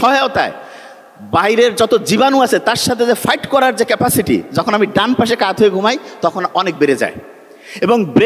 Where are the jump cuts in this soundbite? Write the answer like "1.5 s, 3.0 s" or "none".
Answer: none